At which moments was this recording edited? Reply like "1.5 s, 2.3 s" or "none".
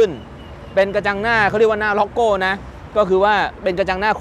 none

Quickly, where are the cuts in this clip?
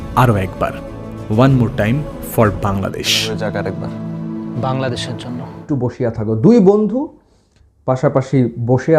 5.5 s

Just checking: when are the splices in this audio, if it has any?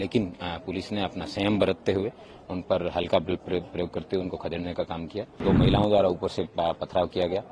5.4 s

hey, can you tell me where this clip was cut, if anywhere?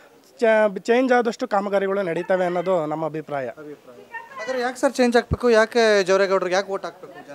none

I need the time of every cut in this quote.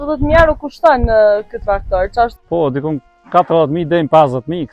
2.4 s

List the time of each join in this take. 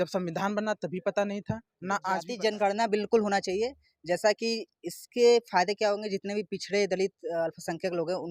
2.3 s

